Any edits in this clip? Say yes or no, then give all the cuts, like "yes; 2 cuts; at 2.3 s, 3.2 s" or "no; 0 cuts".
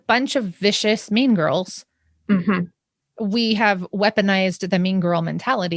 yes; 1 cut; at 2.6 s